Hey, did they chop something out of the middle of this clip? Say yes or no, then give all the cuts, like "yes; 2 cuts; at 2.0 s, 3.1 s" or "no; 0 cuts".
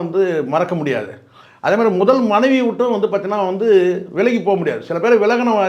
no; 0 cuts